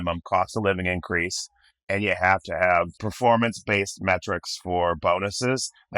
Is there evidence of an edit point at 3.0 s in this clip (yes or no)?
yes